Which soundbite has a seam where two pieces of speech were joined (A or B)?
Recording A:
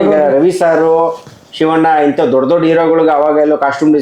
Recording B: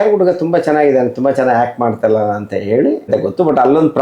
B